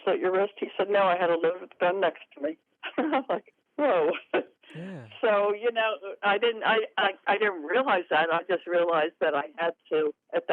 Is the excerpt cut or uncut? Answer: uncut